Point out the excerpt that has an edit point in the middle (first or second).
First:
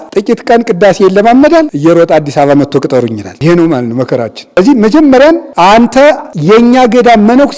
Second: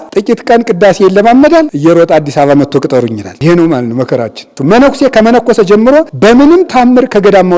second